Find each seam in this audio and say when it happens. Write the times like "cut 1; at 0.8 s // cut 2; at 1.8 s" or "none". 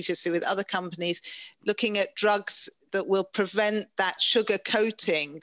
cut 1; at 4.2 s